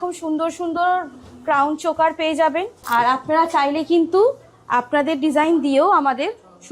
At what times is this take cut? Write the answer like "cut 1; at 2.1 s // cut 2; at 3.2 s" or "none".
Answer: cut 1; at 2.8 s

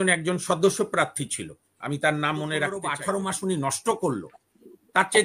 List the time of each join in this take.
cut 1; at 2.9 s

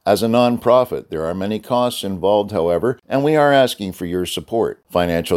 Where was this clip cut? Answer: cut 1; at 3.0 s

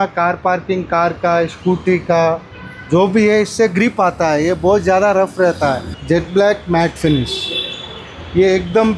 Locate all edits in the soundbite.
cut 1; at 5.9 s

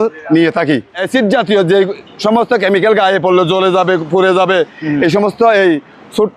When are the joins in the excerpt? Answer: cut 1; at 1.0 s

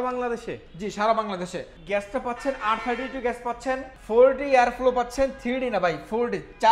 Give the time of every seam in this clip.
cut 1; at 1.7 s // cut 2; at 3.9 s

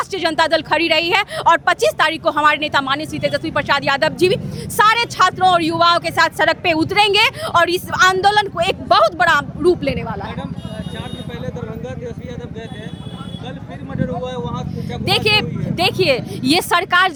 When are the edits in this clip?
none

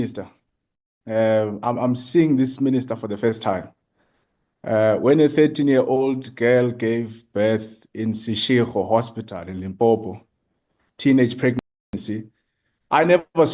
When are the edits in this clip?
none

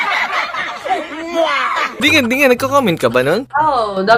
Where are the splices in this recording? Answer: none

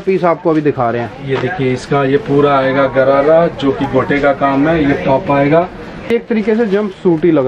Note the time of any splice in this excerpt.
cut 1; at 6.1 s

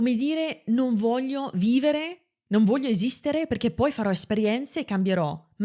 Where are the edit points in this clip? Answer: none

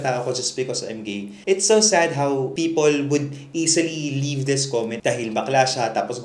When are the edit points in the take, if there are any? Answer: cut 1; at 1.3 s // cut 2; at 5.0 s

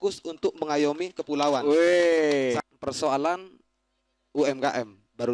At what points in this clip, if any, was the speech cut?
cut 1; at 2.6 s

